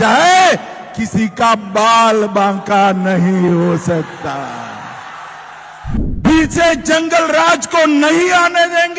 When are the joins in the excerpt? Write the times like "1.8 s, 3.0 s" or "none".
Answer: 6.0 s